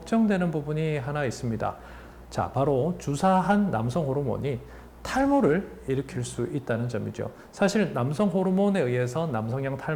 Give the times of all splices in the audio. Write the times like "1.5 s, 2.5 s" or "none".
none